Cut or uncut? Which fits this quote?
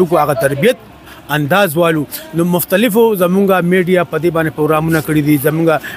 uncut